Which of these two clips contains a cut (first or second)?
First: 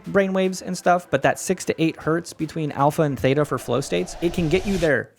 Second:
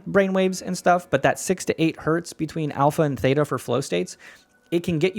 first